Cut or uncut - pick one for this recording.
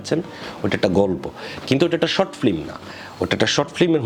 uncut